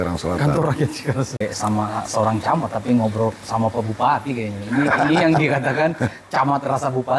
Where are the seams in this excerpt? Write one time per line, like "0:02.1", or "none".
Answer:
0:01.4